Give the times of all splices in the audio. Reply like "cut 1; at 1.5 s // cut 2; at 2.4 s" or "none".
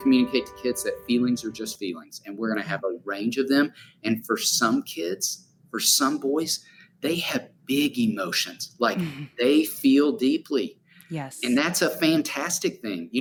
none